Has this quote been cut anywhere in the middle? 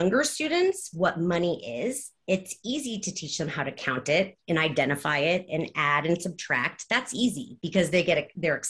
no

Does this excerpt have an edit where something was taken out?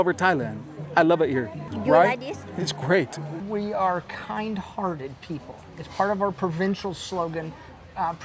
yes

